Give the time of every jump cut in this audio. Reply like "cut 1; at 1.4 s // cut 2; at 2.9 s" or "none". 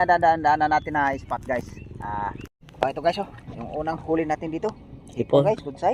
cut 1; at 2.5 s